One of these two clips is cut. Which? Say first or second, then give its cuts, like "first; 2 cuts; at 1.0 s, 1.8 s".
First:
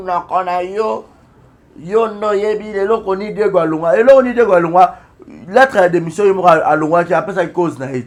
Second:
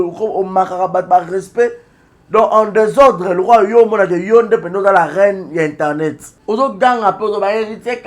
second; 1 cut; at 6.3 s